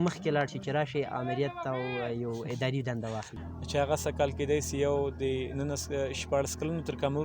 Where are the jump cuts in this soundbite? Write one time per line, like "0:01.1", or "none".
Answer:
0:03.3